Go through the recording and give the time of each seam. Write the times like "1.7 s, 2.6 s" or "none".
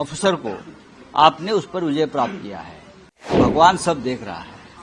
3.3 s